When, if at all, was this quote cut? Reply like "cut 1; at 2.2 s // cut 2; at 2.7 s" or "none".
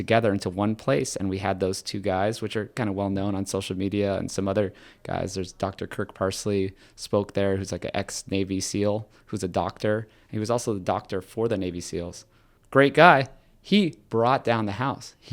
cut 1; at 12.5 s